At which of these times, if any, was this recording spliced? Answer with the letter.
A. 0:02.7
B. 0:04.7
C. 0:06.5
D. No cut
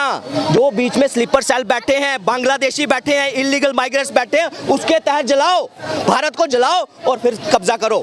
D